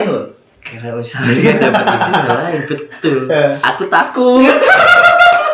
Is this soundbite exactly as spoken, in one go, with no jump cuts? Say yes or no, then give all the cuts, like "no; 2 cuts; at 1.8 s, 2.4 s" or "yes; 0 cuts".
no; 1 cut; at 3.6 s